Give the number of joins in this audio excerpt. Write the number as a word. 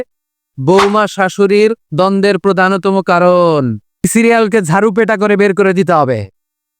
two